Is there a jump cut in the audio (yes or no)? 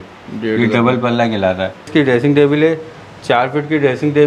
yes